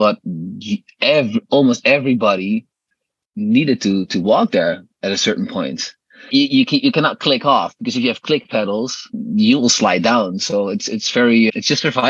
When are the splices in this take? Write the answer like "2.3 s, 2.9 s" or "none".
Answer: 6.3 s